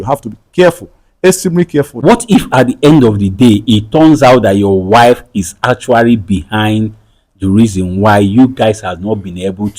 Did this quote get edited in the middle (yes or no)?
yes